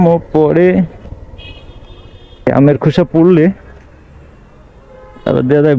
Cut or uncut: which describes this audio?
cut